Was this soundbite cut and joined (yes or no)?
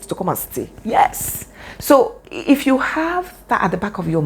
no